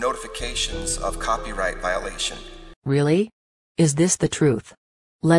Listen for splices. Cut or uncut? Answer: cut